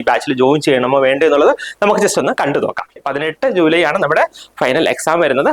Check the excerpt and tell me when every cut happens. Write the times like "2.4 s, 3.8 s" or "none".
3.0 s